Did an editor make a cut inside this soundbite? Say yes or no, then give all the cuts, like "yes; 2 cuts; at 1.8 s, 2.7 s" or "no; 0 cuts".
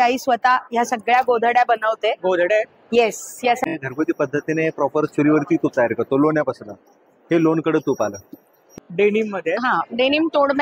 yes; 2 cuts; at 3.7 s, 8.7 s